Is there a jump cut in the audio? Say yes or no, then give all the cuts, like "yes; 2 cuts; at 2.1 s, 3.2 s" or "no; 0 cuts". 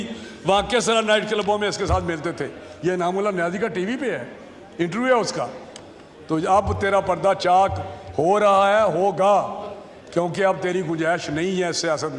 no; 0 cuts